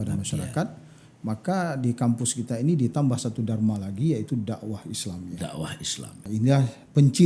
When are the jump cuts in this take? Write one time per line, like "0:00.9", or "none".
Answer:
0:06.2